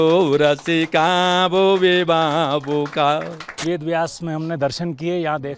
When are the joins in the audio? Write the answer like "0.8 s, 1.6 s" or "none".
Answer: 3.6 s